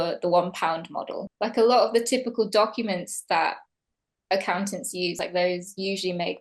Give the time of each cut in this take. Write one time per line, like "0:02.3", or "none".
0:01.2
0:05.2